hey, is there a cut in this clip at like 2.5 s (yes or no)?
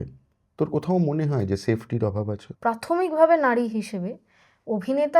yes